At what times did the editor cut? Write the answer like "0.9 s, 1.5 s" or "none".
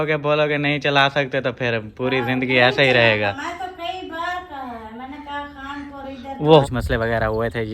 6.6 s